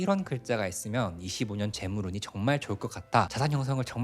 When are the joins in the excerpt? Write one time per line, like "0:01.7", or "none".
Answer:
none